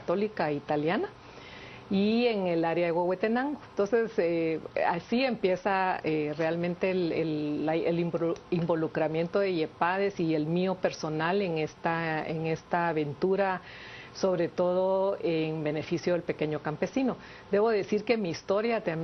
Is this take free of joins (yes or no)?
no